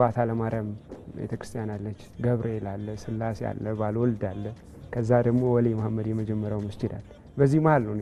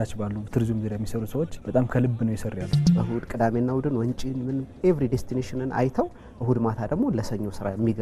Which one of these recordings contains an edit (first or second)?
second